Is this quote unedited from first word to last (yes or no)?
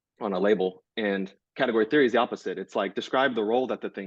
yes